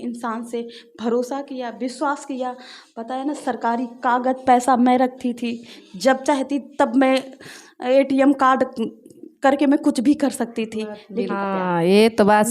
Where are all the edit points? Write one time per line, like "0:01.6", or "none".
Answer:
0:11.3